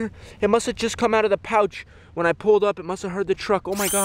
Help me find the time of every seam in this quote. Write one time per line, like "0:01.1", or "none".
none